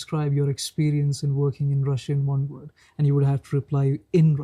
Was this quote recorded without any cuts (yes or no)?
yes